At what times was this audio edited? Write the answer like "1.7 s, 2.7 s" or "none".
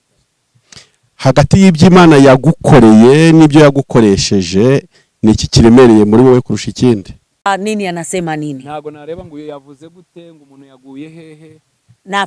7.5 s